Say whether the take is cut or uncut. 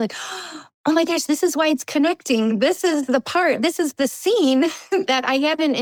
uncut